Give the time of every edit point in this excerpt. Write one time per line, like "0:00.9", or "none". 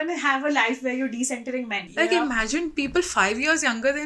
0:01.8